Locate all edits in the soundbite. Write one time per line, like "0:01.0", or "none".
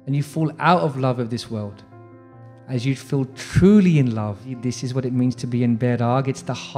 0:04.5